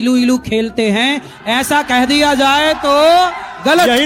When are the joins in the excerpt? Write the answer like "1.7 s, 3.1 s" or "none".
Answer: none